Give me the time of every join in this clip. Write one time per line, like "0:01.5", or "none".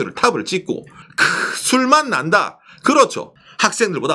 0:00.9
0:03.2